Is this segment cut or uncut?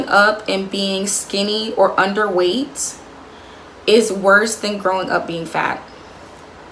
uncut